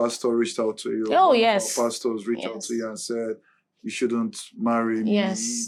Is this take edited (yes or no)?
no